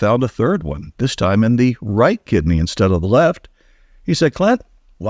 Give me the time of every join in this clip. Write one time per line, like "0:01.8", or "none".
none